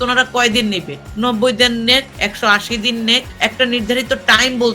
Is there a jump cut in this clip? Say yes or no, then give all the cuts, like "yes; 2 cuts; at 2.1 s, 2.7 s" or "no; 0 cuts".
yes; 3 cuts; at 1.0 s, 2.1 s, 3.3 s